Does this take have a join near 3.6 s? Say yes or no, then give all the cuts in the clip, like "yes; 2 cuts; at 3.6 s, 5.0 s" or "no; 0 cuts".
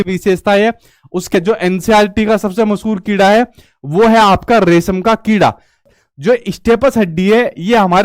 no; 2 cuts; at 1.3 s, 5.8 s